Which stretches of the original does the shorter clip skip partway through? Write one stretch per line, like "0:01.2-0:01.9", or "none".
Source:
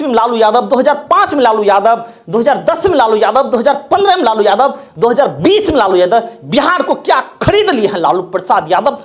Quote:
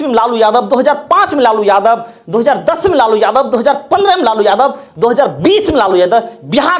none